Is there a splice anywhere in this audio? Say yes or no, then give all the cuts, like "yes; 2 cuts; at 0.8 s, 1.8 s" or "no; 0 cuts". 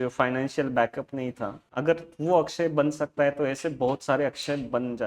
yes; 1 cut; at 1.6 s